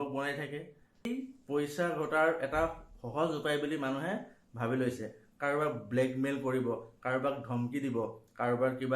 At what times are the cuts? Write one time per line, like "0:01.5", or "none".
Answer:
0:01.1